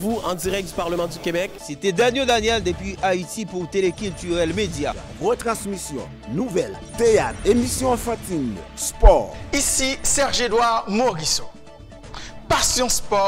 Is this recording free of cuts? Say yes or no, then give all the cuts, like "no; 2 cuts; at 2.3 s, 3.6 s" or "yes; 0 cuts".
no; 1 cut; at 6.8 s